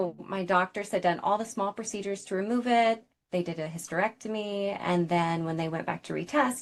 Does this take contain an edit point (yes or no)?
no